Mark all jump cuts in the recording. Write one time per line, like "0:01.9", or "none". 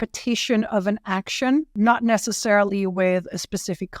0:01.7